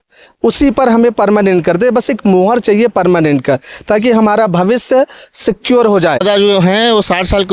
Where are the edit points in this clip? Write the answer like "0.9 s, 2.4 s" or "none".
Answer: 6.2 s